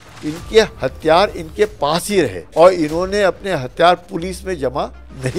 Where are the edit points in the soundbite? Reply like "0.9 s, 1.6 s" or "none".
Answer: 2.4 s